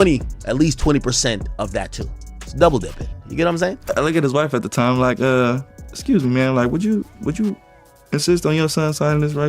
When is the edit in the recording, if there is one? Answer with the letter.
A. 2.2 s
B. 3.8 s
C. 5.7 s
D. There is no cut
B